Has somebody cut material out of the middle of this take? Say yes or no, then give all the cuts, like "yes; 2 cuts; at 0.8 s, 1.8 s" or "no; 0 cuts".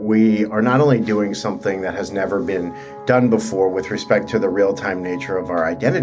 no; 0 cuts